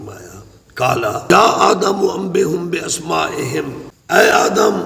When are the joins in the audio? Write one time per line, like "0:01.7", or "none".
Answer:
0:01.3
0:03.9

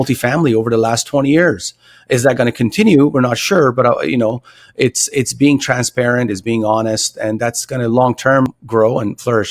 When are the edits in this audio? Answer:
0:08.6

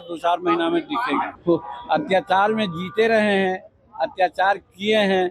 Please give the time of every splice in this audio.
0:01.3

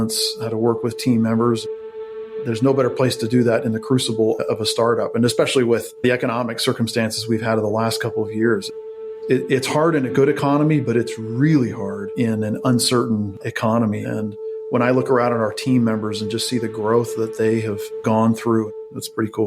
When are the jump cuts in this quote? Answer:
0:17.9
0:18.7

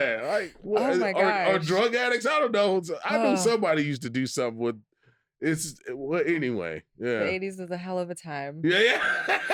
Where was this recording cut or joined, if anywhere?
none

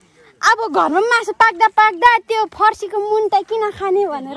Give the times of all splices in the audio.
none

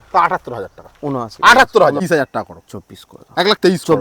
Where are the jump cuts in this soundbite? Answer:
0:02.0

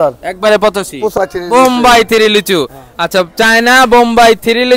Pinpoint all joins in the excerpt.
0:01.1

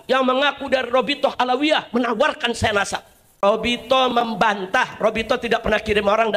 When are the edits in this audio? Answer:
0:03.4

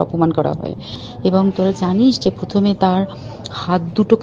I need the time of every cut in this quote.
0:01.0

